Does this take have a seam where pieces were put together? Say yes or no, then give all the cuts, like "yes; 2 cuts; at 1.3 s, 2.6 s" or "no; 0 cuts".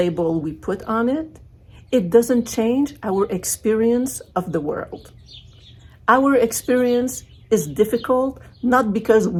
no; 0 cuts